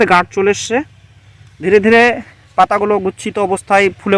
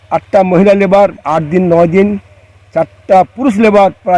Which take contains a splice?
second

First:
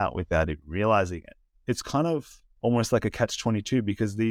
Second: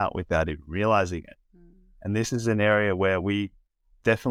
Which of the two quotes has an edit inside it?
first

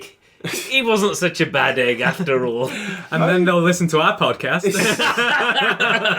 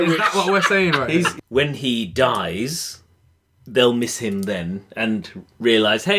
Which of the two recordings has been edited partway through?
second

